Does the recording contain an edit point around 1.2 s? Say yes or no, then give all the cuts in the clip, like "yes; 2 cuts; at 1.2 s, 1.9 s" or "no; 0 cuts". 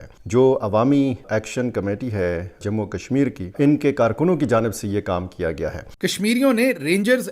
yes; 2 cuts; at 1.2 s, 5.8 s